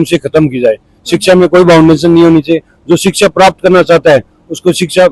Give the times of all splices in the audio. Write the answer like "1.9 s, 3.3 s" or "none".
none